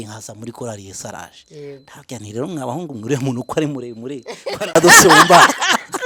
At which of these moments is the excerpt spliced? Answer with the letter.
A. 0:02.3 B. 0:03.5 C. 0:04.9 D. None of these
D